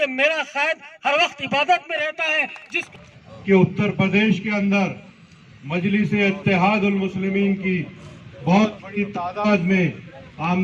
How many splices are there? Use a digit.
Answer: 1